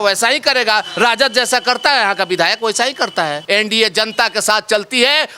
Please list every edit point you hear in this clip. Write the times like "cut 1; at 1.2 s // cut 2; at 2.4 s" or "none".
cut 1; at 3.4 s